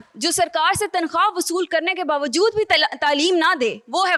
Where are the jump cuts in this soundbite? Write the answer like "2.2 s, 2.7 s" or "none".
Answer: none